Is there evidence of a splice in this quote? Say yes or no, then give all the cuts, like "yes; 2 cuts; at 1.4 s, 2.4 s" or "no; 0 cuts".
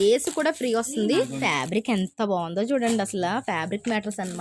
yes; 1 cut; at 1.4 s